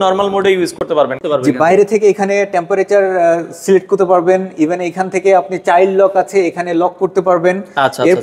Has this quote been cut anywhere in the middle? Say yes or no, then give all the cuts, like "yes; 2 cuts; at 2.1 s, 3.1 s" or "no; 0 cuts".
yes; 1 cut; at 1.2 s